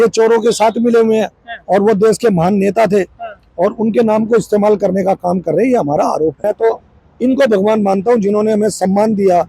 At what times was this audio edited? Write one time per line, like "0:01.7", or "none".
0:06.4